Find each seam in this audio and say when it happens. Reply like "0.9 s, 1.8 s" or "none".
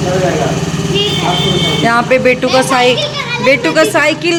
none